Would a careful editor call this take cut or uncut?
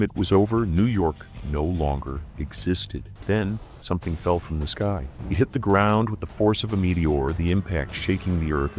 cut